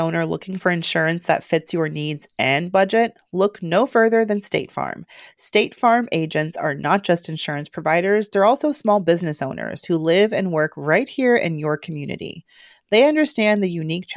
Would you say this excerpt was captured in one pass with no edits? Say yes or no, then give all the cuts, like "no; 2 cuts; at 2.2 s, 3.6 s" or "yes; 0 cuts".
yes; 0 cuts